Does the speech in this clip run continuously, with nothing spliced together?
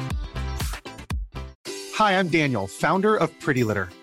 no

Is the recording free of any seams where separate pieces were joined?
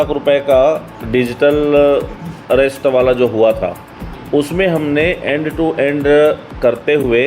no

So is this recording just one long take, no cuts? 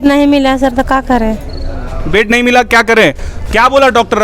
yes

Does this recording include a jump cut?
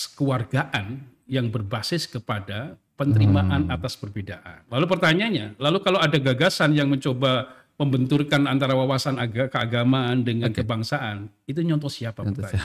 yes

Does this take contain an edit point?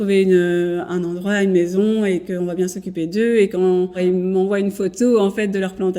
yes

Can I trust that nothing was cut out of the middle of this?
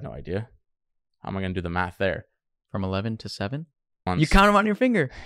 no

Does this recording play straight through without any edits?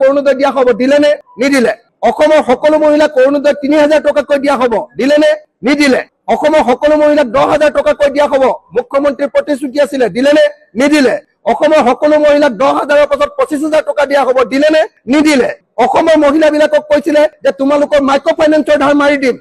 yes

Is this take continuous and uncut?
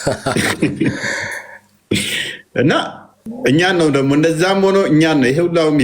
no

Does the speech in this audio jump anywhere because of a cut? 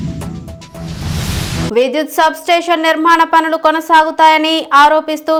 no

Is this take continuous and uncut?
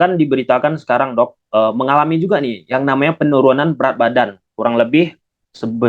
yes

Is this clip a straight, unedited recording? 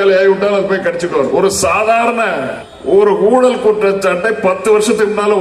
no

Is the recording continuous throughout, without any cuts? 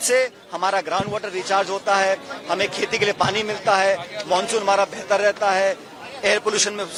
yes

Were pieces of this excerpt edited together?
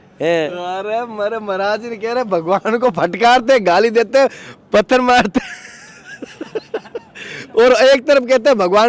no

